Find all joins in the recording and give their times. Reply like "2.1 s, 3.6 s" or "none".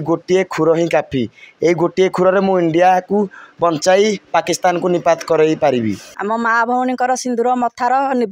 6.1 s